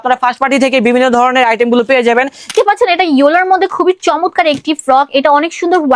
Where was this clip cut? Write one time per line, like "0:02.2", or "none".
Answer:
0:02.5